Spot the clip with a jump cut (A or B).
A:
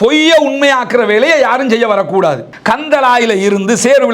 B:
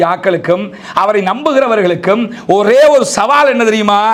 A